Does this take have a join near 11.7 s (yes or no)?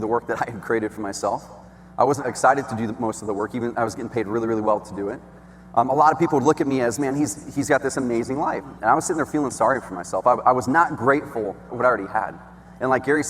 yes